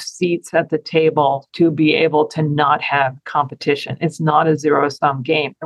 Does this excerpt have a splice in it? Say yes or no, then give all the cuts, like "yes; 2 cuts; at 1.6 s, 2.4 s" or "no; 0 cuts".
no; 0 cuts